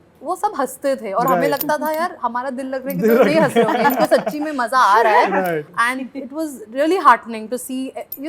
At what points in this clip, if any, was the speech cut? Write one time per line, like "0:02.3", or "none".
none